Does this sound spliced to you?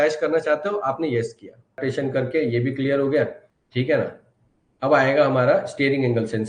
yes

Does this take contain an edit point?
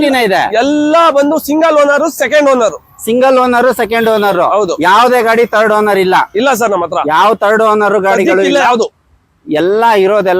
no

